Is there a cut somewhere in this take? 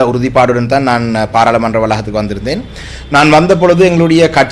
no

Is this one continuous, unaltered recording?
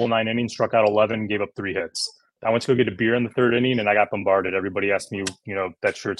no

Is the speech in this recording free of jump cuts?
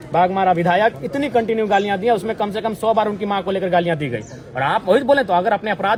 yes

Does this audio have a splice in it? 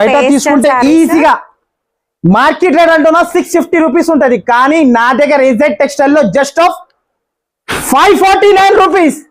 no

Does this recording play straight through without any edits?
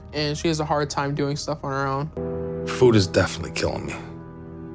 no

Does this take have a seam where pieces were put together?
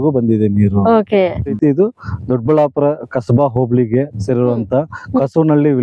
yes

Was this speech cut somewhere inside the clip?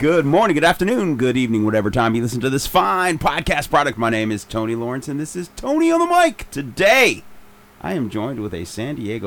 no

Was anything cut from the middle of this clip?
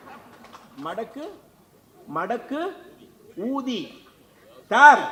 no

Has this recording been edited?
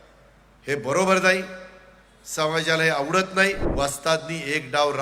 yes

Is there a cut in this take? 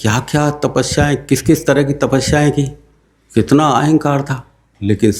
no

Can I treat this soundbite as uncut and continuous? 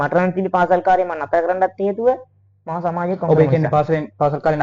yes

